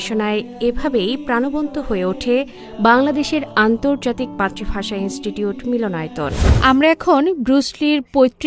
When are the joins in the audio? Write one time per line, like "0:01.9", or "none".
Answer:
0:06.5